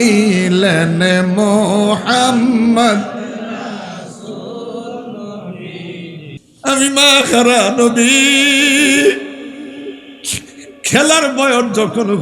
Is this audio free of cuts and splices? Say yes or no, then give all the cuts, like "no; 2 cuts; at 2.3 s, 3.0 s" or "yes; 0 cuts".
no; 1 cut; at 6.3 s